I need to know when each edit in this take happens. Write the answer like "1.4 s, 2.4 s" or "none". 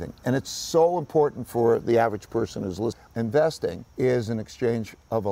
3.0 s, 3.8 s